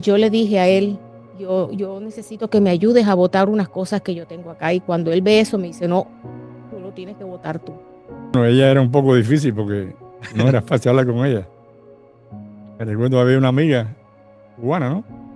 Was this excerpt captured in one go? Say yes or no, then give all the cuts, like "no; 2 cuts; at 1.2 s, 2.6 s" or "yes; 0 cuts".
no; 1 cut; at 8.3 s